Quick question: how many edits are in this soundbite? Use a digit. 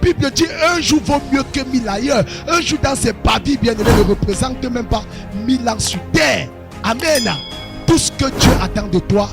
0